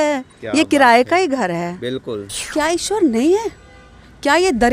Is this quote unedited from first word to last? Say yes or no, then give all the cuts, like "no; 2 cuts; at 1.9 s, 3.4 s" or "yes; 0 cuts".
no; 1 cut; at 2.5 s